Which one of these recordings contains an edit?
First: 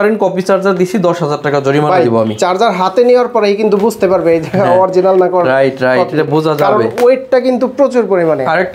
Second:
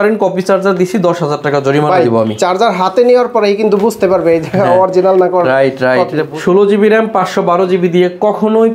second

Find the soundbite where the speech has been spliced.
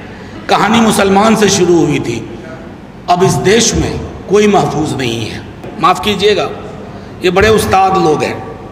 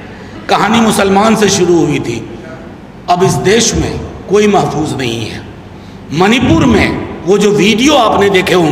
first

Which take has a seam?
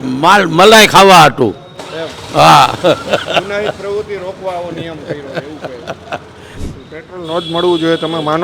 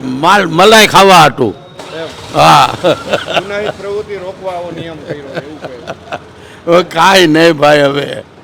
first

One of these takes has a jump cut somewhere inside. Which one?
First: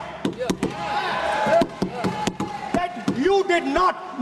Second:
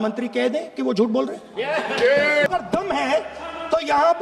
second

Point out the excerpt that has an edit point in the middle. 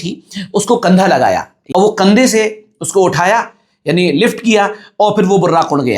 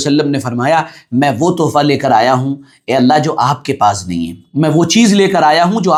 first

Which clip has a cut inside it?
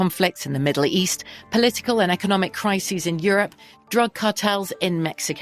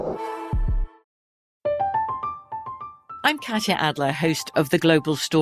second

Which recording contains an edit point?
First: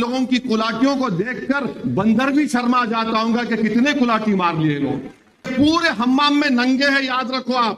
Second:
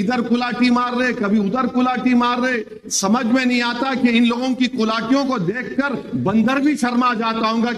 first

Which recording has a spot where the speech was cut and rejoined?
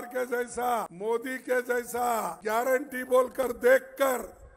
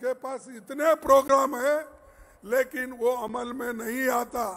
first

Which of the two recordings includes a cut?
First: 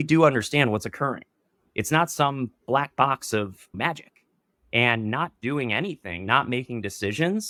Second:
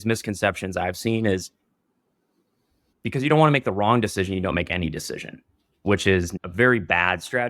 second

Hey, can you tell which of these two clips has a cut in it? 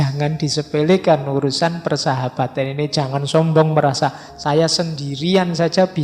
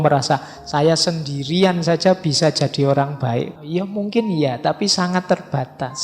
second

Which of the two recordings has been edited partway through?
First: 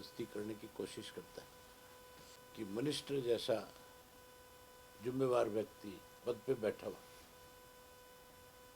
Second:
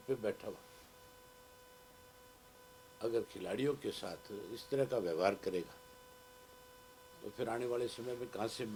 first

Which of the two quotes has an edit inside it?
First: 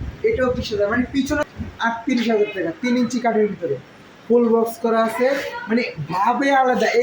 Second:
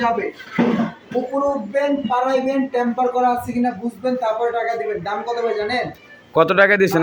first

